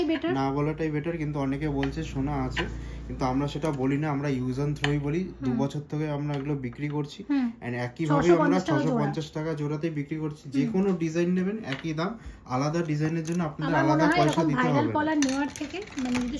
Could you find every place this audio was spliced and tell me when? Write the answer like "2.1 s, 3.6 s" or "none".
none